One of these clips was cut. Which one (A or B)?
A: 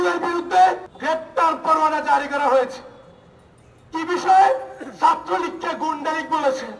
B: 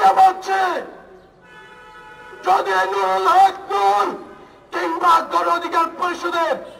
A